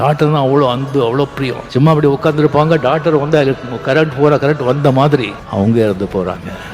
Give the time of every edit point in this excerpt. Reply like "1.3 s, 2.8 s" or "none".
1.6 s, 5.4 s